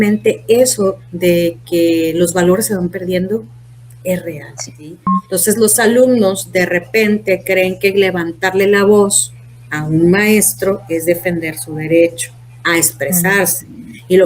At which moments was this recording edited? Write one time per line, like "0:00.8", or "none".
0:05.1